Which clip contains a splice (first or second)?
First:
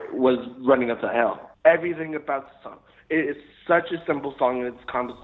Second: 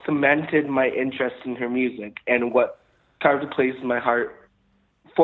first